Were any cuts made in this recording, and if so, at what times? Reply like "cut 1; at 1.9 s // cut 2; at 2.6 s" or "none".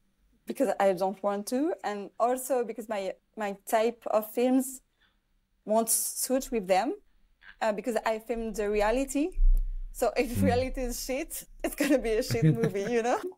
none